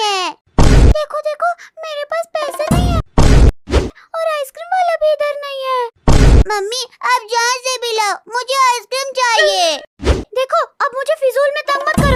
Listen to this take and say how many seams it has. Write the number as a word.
zero